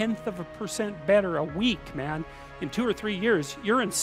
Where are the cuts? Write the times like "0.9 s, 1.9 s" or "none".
none